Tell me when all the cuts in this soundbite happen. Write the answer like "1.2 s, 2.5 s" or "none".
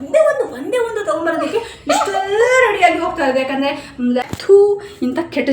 4.2 s

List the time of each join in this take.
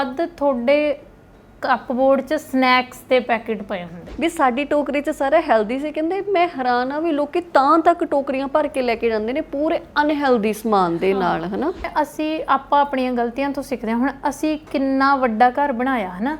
4.0 s, 11.8 s

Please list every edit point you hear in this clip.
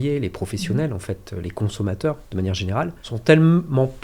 3.1 s

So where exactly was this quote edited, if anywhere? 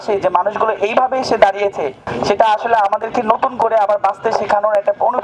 none

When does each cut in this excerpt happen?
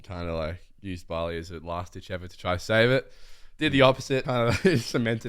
4.3 s

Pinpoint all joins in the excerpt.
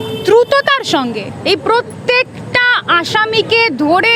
none

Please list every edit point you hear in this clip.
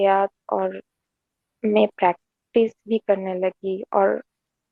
none

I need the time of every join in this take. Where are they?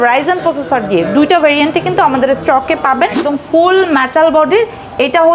3.2 s

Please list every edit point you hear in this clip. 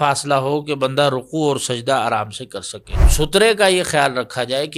3.0 s

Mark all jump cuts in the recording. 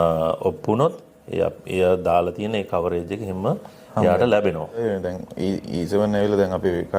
4.8 s

